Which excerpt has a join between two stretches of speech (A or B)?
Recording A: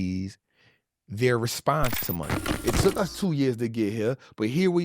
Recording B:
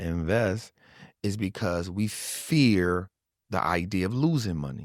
A